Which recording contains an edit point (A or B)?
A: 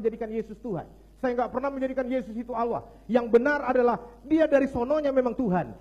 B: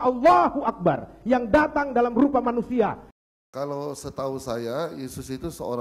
B